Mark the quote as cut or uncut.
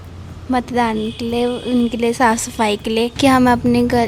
cut